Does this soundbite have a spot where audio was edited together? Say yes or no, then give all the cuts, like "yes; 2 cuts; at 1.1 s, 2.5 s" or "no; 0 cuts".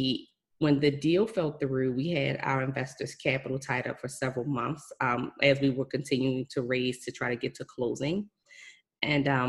no; 0 cuts